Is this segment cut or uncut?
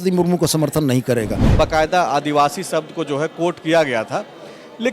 cut